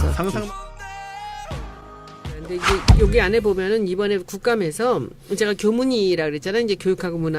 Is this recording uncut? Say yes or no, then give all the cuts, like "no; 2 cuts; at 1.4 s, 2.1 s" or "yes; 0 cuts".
yes; 0 cuts